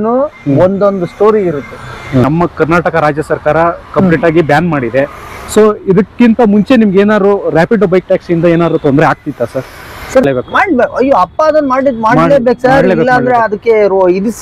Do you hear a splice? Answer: yes; 2 cuts; at 2.3 s, 10.2 s

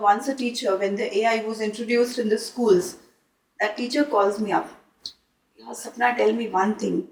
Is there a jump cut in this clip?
no; 0 cuts

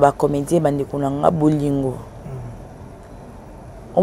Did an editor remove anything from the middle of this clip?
no; 0 cuts

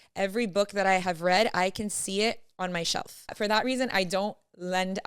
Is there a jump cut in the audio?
yes; 1 cut; at 3.3 s

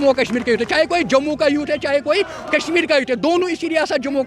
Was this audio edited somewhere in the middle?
no; 0 cuts

